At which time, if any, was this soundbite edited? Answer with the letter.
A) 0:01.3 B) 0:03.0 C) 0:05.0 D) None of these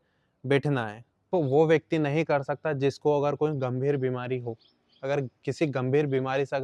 A